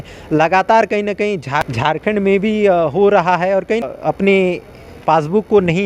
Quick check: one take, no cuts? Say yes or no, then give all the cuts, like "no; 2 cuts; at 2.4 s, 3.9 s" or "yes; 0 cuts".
no; 2 cuts; at 1.7 s, 3.8 s